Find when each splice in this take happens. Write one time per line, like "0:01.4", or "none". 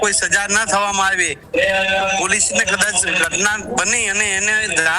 0:01.3